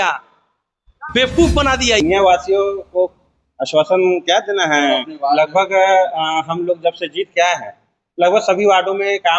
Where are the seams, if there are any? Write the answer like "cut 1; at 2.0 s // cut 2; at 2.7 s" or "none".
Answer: cut 1; at 2.0 s